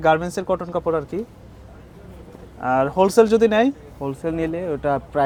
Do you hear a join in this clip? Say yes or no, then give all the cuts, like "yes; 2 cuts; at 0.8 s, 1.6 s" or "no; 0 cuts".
no; 0 cuts